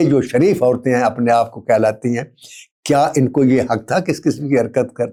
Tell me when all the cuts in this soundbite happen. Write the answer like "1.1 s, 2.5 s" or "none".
none